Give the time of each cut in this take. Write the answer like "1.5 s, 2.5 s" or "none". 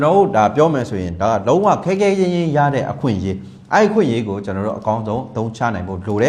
none